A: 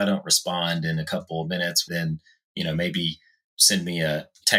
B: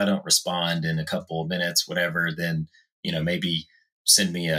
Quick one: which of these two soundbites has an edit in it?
A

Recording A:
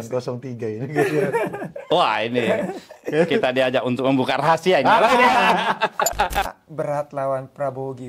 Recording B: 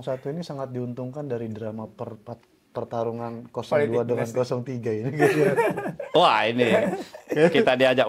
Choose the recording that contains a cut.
A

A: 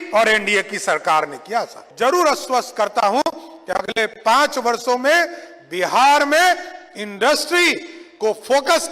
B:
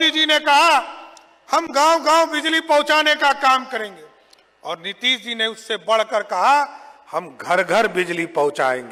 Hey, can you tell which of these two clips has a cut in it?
A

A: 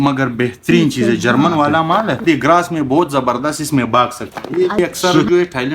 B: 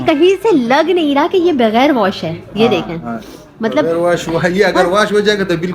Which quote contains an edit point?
A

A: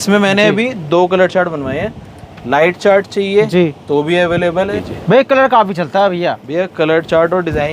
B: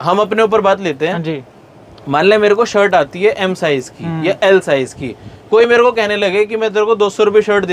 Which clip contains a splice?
A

